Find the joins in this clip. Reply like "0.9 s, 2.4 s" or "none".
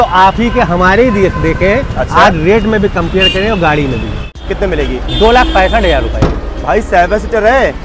4.4 s